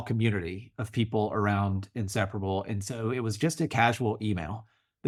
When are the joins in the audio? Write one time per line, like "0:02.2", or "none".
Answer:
none